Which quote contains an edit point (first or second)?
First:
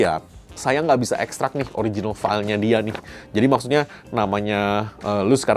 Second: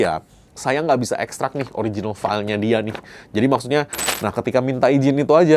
second